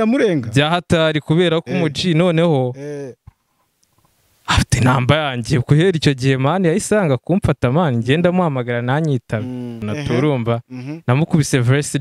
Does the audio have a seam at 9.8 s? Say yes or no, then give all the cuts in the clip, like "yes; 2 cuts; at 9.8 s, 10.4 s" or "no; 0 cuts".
yes; 1 cut; at 9.8 s